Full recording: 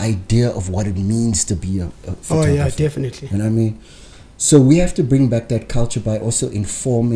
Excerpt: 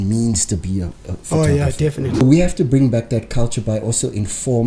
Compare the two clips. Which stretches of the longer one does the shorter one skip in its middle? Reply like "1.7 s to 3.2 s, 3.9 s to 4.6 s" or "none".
3.2 s to 4.6 s